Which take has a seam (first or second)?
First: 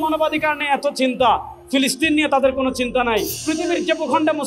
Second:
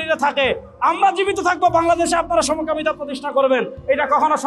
first